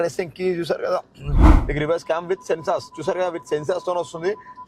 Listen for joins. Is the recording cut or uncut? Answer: cut